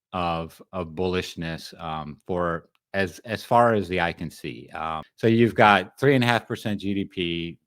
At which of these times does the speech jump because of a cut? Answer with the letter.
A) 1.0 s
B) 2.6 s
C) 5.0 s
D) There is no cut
C